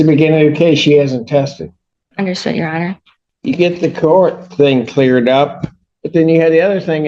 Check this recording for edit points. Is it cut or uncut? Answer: cut